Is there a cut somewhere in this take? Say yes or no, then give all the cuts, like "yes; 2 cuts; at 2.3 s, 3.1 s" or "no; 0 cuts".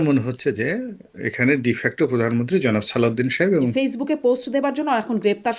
yes; 1 cut; at 3.7 s